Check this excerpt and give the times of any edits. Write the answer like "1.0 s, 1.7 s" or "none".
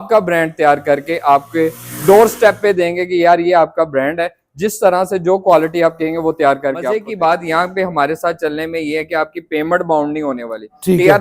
7.1 s